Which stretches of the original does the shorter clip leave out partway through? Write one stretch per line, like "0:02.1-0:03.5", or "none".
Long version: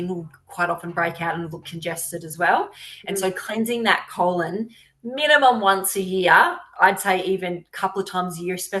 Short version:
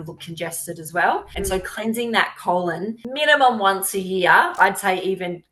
0:02.7-0:03.0
0:04.7-0:05.0
0:06.5-0:06.7